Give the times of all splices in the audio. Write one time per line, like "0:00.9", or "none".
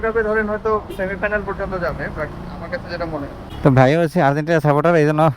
0:03.5